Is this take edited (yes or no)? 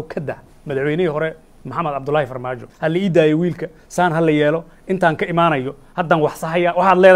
yes